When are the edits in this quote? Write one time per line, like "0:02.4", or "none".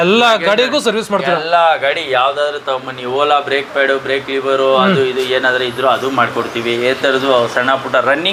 none

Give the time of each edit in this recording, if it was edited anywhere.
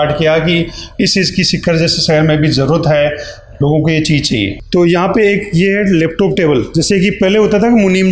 0:04.6

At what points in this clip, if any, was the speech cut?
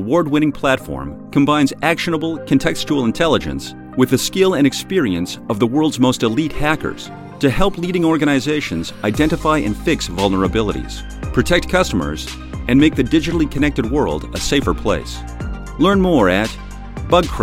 none

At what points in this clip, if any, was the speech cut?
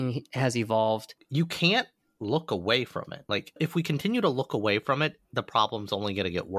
0:01.2
0:03.2

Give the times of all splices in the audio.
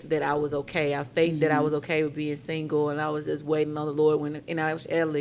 none

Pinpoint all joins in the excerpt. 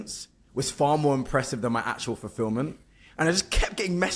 none

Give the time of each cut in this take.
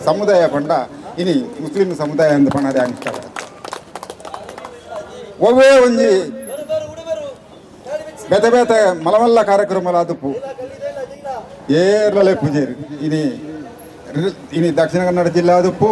none

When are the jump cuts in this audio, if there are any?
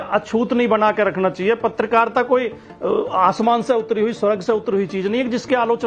none

